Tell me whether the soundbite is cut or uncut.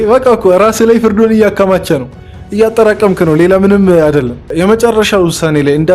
cut